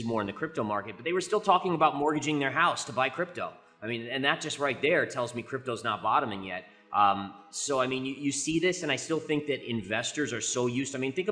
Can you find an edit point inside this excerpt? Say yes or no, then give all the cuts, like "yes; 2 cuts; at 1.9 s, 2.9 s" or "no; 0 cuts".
no; 0 cuts